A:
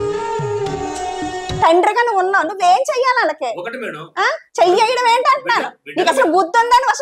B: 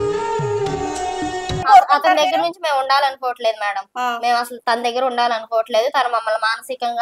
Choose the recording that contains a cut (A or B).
B